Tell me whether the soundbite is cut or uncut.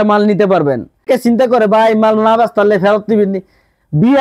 cut